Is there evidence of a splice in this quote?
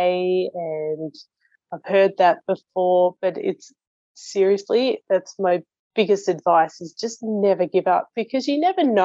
yes; 1 cut; at 5.8 s

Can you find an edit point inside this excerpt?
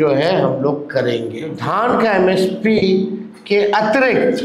yes; 1 cut; at 1.6 s

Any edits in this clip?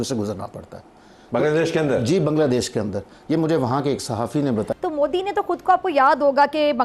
yes; 1 cut; at 4.7 s

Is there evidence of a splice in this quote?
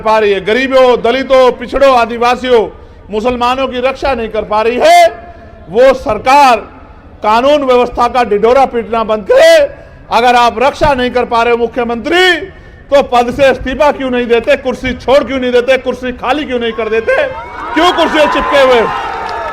no; 0 cuts

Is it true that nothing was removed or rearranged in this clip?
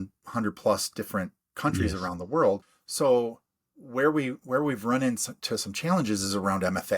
no; 1 cut; at 2.8 s

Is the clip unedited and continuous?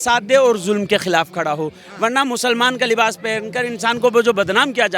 yes; 0 cuts

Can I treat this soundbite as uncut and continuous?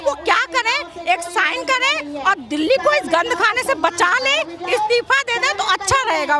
yes; 0 cuts

